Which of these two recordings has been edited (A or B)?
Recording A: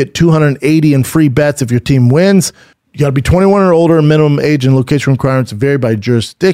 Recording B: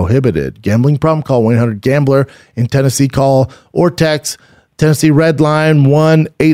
A